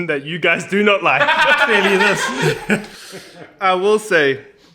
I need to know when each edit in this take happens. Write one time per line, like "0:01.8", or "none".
none